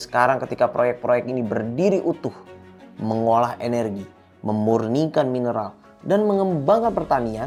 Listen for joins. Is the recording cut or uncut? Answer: uncut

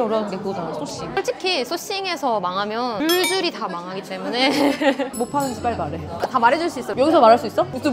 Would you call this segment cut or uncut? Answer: cut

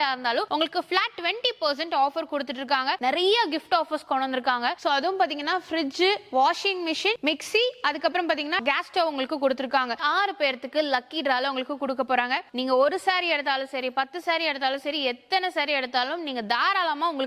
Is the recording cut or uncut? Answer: cut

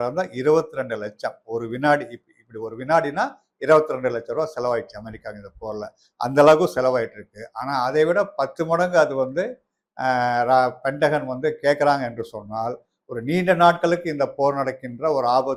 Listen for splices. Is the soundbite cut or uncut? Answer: uncut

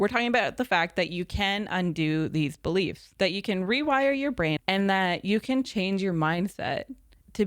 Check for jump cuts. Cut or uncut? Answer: cut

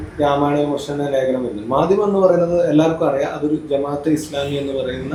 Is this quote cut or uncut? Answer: uncut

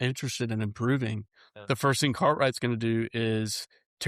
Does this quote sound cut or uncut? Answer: uncut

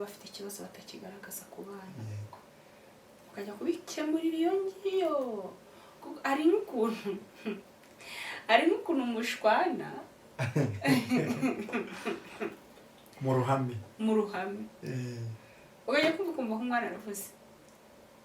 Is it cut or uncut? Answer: uncut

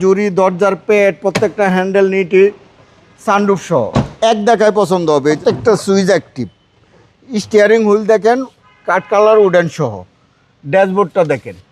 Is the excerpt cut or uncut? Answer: cut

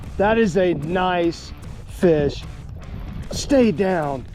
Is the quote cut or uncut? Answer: uncut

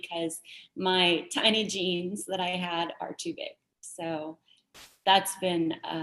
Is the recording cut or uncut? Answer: uncut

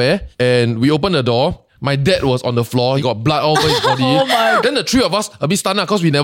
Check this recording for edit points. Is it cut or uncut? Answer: cut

